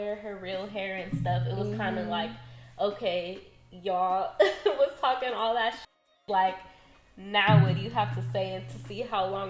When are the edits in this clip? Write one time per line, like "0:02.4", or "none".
none